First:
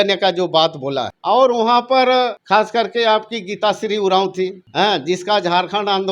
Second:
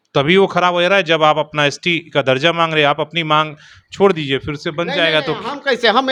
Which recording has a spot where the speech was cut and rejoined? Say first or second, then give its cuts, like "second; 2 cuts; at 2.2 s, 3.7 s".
first; 3 cuts; at 1.1 s, 2.4 s, 4.6 s